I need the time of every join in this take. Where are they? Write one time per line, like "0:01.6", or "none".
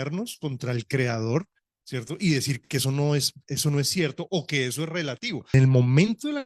0:05.5